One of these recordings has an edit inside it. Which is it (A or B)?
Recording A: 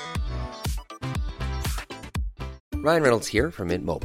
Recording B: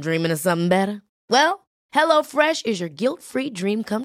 A